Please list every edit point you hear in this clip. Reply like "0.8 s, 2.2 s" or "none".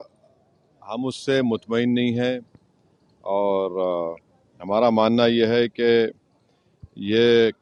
none

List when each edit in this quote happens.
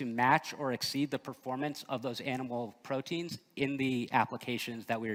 none

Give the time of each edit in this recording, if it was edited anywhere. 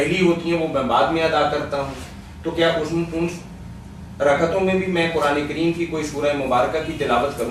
4.8 s

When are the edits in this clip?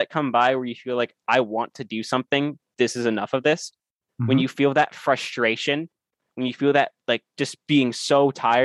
none

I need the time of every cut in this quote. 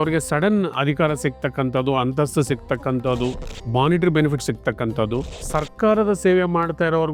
3.5 s, 5.4 s

